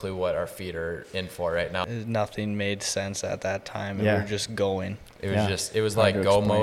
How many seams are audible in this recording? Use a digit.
1